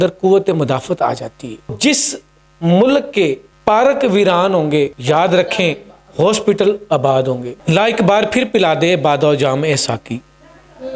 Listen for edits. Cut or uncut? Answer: cut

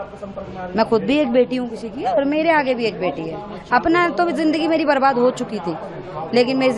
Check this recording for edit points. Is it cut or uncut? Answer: uncut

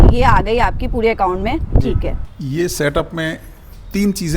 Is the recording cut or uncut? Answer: cut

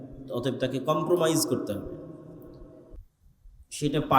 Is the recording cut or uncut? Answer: cut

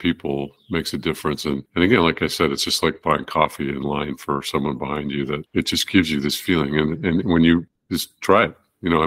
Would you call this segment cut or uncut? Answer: cut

